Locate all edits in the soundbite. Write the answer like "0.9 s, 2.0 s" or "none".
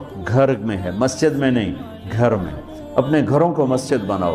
none